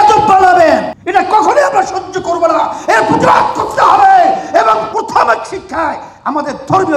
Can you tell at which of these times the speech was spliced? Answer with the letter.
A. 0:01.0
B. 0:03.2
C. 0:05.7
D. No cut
A